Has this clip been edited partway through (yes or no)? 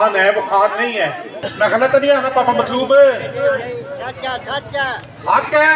yes